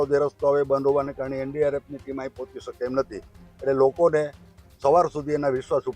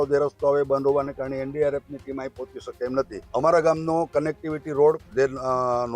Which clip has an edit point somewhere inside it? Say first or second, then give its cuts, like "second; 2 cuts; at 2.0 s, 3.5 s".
second; 1 cut; at 3.2 s